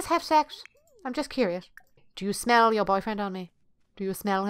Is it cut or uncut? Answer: cut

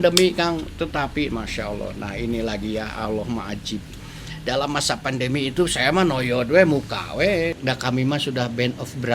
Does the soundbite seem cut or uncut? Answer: cut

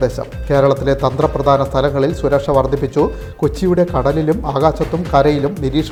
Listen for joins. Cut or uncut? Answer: uncut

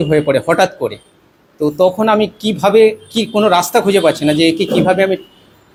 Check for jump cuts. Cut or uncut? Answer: uncut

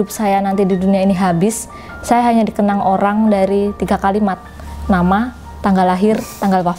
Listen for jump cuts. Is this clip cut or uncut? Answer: uncut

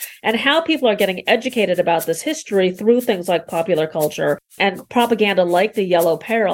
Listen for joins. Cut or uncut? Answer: cut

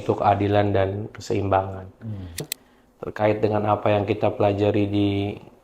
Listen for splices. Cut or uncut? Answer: cut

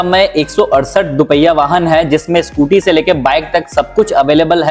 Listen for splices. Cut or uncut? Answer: uncut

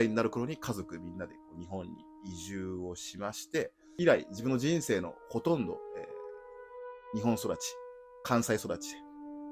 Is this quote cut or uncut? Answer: uncut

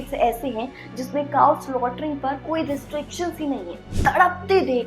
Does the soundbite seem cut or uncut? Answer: cut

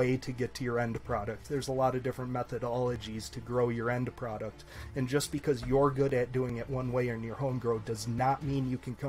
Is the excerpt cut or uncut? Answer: uncut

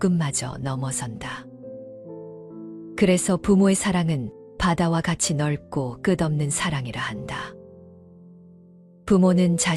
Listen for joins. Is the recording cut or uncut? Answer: cut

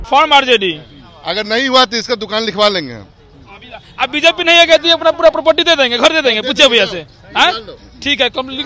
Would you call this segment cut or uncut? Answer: uncut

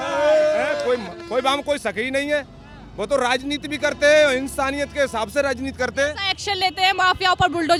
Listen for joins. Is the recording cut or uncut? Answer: uncut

